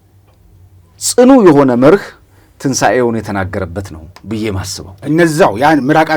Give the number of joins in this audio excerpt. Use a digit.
1